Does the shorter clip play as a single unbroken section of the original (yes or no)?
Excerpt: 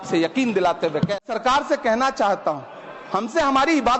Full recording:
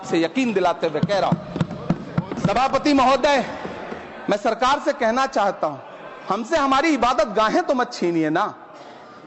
no